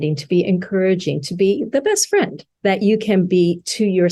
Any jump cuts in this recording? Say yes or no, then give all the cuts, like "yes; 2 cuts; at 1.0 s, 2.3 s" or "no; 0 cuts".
no; 0 cuts